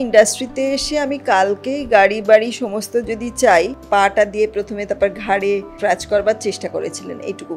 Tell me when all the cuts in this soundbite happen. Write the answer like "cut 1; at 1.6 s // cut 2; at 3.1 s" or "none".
cut 1; at 3.8 s // cut 2; at 5.7 s